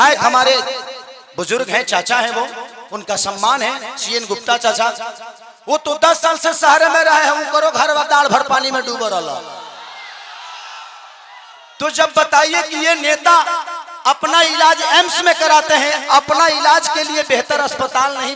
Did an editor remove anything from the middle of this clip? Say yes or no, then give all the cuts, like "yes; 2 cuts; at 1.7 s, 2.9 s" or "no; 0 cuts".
no; 0 cuts